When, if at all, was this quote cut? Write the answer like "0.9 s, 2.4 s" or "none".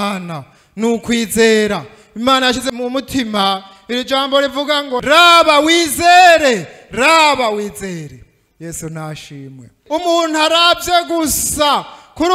2.6 s, 9.7 s